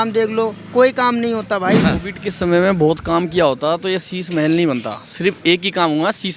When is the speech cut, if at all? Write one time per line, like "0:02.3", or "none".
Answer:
0:01.8